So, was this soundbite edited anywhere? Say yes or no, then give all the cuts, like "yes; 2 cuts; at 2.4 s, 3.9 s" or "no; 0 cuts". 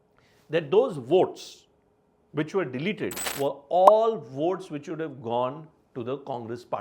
yes; 1 cut; at 3.2 s